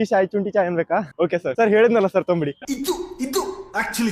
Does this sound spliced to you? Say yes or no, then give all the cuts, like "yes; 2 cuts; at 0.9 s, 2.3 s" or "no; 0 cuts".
yes; 2 cuts; at 1.5 s, 2.6 s